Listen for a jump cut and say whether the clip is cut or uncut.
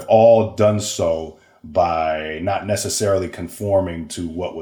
uncut